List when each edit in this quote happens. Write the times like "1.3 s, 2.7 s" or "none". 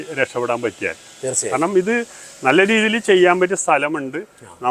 none